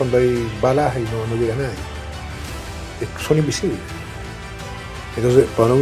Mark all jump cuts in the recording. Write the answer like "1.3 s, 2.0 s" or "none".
none